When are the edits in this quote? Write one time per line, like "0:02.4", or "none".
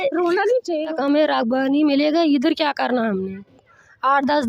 0:00.9

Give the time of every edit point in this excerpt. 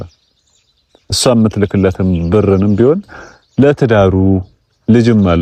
none

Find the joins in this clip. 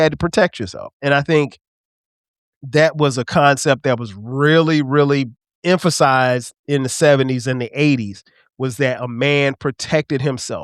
0:05.4

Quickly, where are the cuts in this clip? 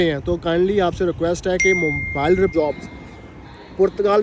0:02.5

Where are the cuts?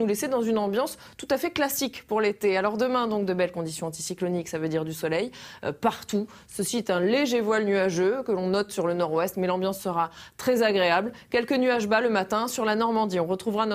none

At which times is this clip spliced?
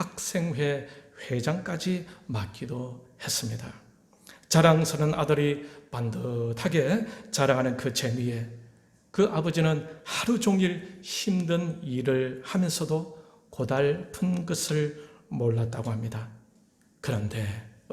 none

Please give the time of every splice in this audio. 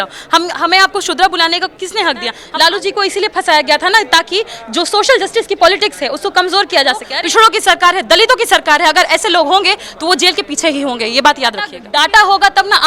0:02.4
0:07.2
0:11.8

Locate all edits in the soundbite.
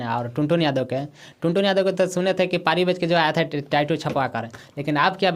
none

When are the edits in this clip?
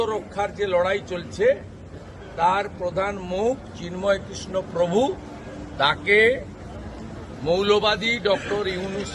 none

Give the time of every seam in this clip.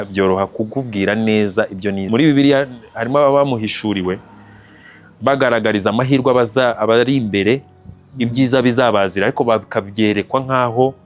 0:02.0

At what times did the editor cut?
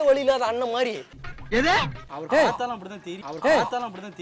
none

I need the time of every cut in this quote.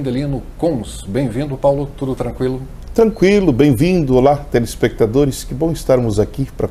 none

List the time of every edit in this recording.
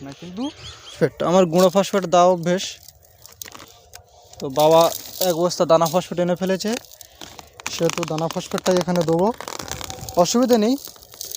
0:00.9

